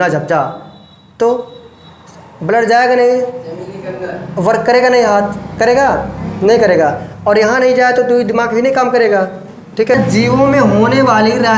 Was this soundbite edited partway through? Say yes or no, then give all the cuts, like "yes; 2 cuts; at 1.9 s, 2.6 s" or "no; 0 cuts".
yes; 1 cut; at 9.9 s